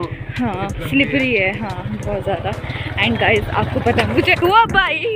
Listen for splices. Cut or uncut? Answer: uncut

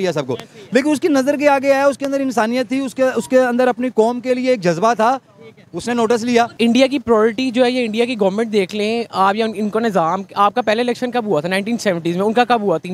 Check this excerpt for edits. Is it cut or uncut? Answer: cut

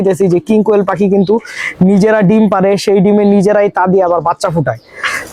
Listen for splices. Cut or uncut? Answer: uncut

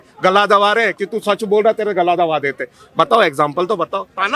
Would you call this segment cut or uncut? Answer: uncut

